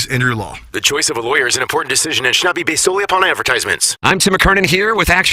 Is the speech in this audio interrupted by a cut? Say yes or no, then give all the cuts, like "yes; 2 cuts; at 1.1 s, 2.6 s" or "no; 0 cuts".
yes; 1 cut; at 3.9 s